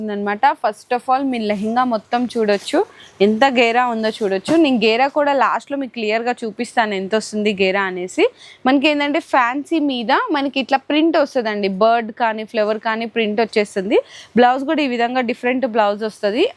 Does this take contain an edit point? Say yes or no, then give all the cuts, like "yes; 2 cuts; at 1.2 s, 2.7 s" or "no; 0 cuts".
no; 0 cuts